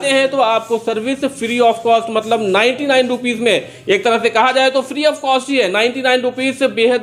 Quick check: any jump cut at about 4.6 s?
no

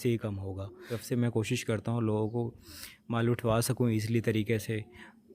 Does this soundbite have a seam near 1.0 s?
yes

